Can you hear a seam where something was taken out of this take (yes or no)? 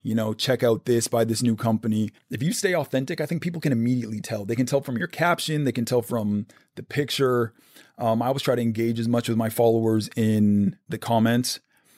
yes